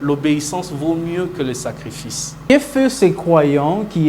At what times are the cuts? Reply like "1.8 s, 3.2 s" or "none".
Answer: 2.5 s